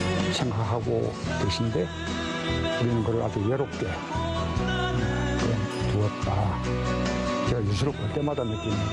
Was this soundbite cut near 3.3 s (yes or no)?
no